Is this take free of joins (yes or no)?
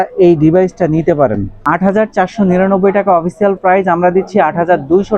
no